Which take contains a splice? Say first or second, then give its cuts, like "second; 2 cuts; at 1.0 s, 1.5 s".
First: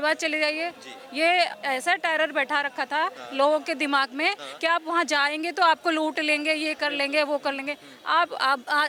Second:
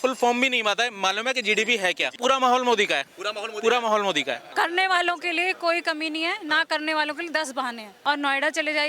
second; 3 cuts; at 2.2 s, 4.4 s, 7.9 s